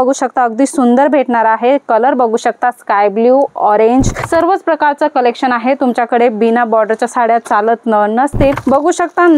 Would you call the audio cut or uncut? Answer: cut